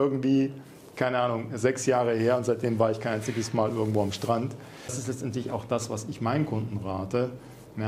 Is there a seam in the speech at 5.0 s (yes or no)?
yes